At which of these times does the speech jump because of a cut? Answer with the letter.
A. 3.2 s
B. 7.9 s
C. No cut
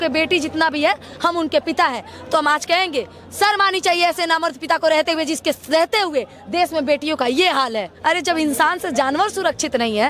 B